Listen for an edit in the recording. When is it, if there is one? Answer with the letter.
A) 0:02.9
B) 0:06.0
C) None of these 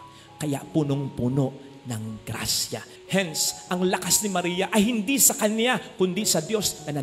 C